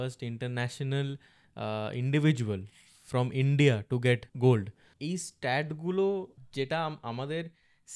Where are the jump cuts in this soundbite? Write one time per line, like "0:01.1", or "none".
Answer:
0:04.3
0:04.9
0:06.4